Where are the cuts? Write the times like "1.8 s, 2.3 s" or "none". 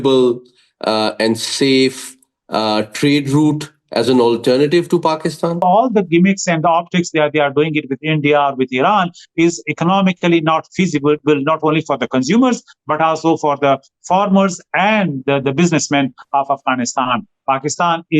5.6 s